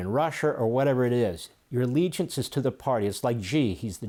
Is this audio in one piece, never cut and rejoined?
yes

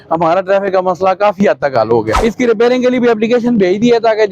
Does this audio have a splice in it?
yes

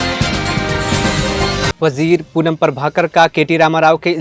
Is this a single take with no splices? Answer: no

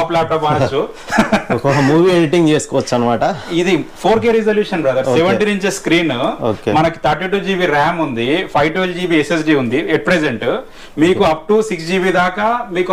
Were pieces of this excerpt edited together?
no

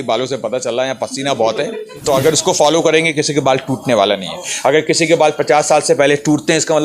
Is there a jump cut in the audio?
yes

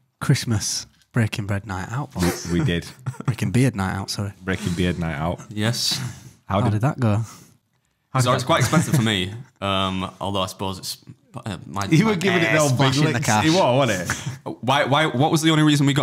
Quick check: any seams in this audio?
no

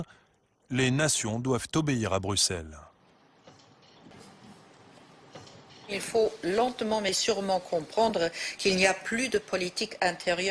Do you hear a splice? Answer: yes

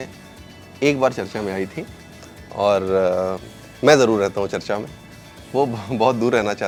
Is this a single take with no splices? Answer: yes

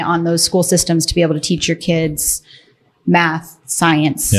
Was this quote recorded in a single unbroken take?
yes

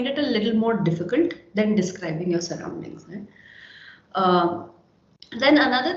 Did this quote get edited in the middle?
no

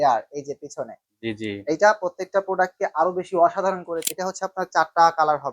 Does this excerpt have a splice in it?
yes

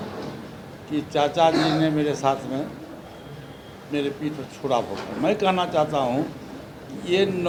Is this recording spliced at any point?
no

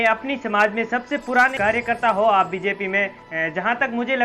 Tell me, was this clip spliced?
yes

